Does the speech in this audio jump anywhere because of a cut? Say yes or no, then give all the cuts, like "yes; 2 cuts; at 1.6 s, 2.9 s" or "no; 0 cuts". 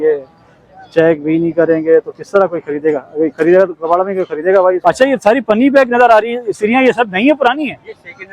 yes; 1 cut; at 4.8 s